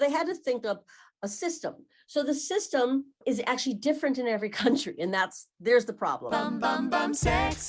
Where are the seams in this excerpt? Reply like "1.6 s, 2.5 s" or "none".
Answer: 6.2 s